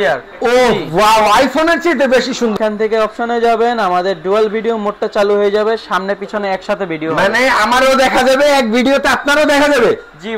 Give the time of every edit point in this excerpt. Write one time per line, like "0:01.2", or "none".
0:02.5